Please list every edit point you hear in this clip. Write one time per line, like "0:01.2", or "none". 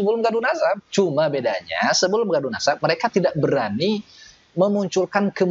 none